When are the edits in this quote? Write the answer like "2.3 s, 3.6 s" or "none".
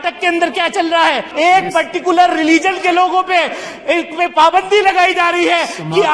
1.3 s